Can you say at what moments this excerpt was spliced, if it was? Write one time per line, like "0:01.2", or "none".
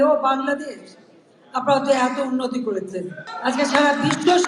0:03.2

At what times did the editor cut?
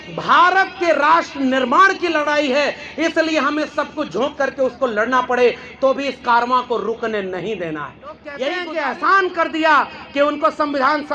0:08.5

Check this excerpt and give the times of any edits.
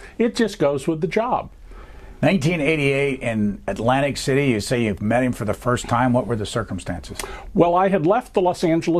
0:02.0

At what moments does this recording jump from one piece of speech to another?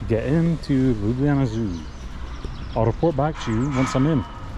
none

